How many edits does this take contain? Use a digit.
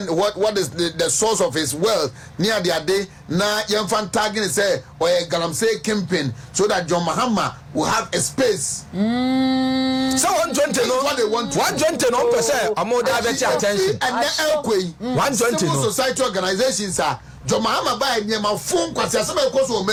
0